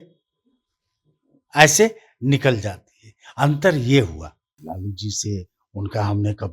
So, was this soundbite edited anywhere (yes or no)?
yes